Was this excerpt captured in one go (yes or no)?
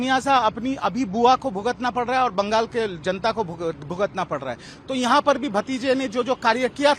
yes